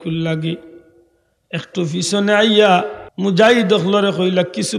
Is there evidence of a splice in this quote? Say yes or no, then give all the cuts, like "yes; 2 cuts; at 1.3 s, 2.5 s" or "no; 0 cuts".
yes; 1 cut; at 3.0 s